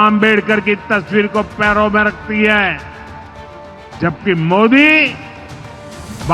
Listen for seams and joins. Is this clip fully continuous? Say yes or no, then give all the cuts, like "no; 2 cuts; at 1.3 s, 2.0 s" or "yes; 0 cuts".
yes; 0 cuts